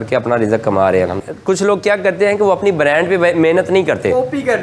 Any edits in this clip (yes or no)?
yes